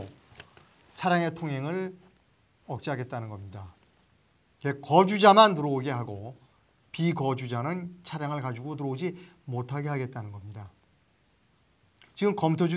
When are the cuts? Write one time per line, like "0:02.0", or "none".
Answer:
0:08.9